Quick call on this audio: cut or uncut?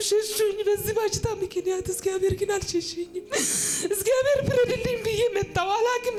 uncut